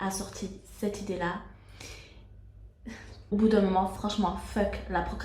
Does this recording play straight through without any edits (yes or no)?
no